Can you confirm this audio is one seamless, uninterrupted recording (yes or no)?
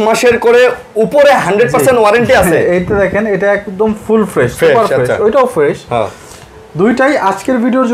yes